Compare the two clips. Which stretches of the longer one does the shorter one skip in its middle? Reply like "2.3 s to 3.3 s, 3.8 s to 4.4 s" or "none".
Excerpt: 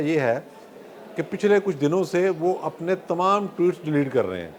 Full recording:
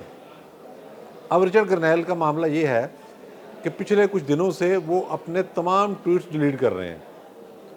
none